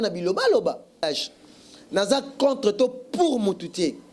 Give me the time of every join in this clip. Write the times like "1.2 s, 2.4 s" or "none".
1.0 s